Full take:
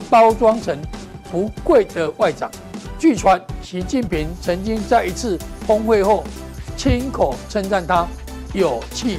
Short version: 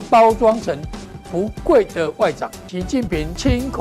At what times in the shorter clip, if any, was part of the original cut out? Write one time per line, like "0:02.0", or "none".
0:02.9